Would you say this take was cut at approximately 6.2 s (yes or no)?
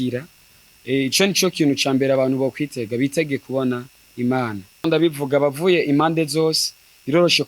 no